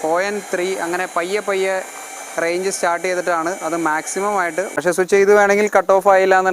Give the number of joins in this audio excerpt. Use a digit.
1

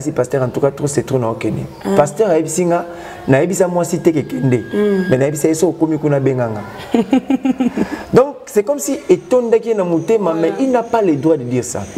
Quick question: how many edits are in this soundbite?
0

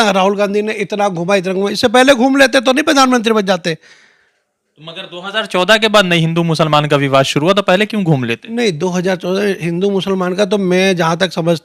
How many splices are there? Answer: 0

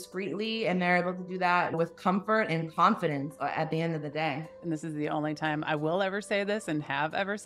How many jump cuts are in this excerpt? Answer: 2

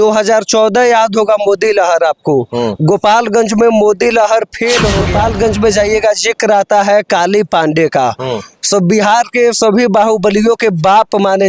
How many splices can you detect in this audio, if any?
1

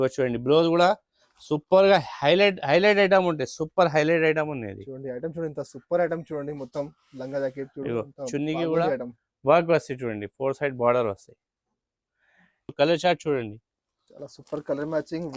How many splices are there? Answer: 1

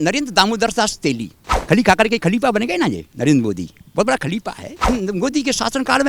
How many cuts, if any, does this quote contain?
2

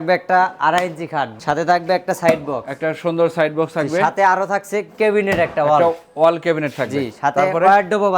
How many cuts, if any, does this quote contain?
1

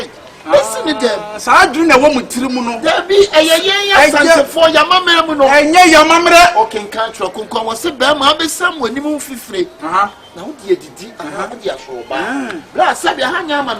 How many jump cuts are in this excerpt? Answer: 0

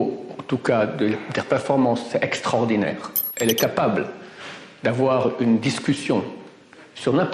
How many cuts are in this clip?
1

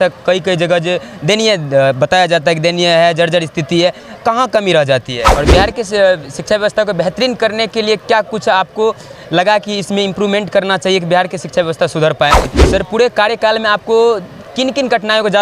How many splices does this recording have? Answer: 2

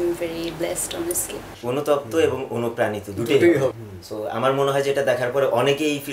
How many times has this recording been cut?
2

